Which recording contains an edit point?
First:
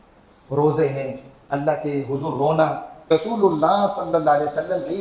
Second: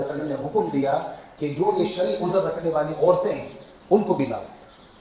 first; 1 cut; at 3.1 s

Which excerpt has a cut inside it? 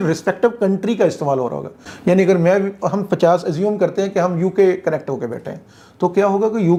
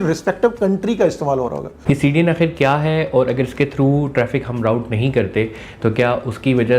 second; 1 cut; at 1.7 s

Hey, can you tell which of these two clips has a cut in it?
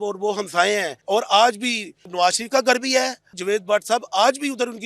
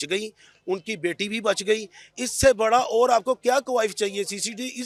first; 3 cuts; at 0.9 s, 2.1 s, 3.4 s

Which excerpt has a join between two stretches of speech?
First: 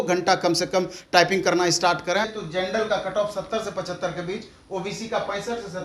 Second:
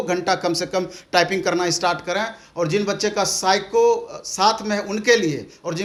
first; 1 cut; at 2.4 s

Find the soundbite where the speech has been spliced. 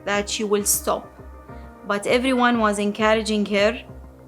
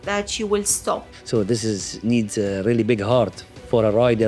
second; 1 cut; at 1.1 s

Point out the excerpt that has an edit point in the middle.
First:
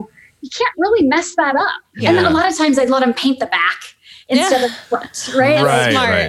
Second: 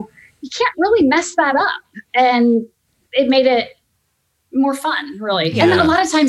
first; 1 cut; at 2.0 s

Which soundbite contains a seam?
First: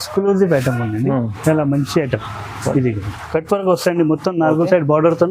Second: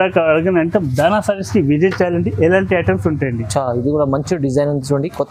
first; 1 cut; at 3.1 s

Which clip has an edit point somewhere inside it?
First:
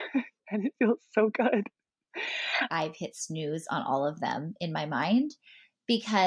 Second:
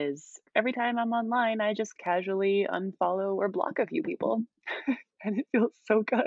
first; 1 cut; at 2.7 s

